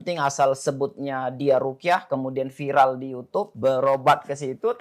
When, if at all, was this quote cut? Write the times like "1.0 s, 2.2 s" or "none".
3.5 s

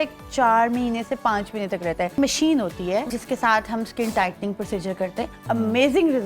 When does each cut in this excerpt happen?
2.2 s, 3.2 s, 5.4 s

